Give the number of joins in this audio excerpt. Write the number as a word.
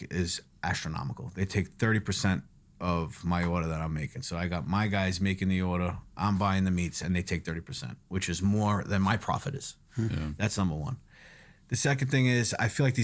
zero